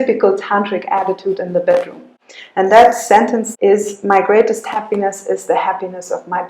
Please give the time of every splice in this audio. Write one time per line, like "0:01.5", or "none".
0:03.5